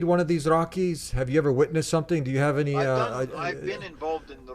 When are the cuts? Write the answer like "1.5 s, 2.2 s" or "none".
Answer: 3.6 s